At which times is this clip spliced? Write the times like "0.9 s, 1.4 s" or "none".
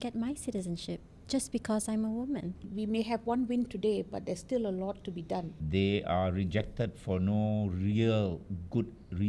2.7 s, 5.6 s

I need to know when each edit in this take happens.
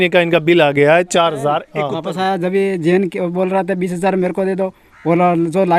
1.7 s

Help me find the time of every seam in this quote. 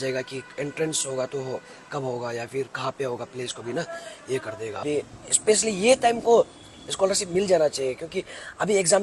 4.8 s

